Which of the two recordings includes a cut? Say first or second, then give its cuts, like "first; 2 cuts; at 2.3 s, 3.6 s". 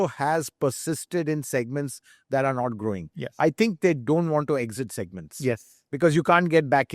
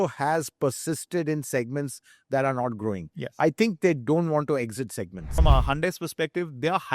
second; 1 cut; at 5.3 s